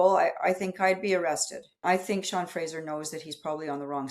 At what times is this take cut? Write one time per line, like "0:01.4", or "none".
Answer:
0:01.8